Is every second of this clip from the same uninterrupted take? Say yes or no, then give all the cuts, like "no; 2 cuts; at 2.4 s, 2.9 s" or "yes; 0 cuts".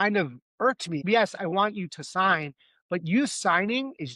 no; 1 cut; at 1.0 s